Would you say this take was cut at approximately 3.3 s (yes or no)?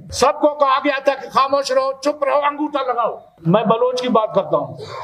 yes